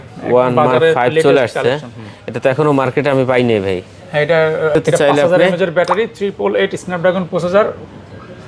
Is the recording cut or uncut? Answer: cut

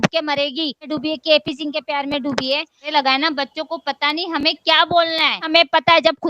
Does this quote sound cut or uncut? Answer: cut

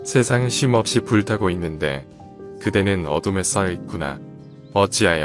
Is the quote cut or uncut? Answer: uncut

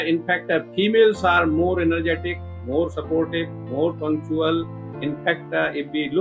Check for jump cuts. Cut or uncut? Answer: uncut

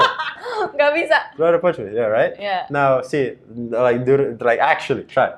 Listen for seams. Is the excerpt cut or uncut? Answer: uncut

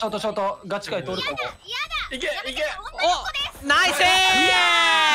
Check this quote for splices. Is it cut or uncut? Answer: uncut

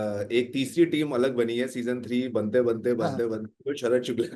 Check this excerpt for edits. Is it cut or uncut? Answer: uncut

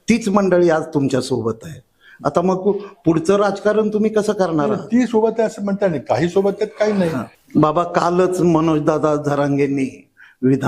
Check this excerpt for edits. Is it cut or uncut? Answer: cut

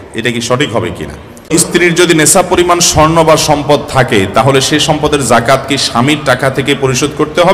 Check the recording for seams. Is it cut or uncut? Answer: cut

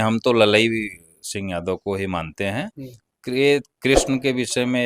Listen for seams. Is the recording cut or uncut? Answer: uncut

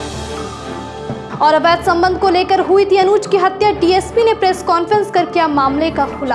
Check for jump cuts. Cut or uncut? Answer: uncut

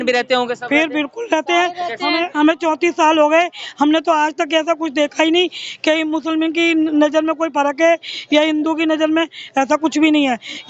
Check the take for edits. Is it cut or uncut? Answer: uncut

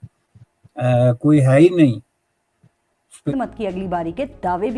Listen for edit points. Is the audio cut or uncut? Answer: cut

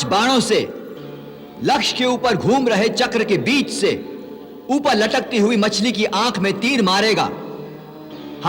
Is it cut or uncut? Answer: uncut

